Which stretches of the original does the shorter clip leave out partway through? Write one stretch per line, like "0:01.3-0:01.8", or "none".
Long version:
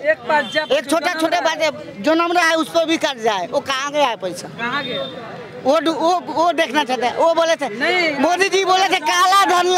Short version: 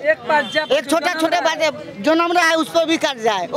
none